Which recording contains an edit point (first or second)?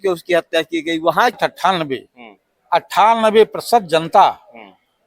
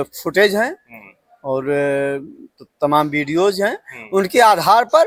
first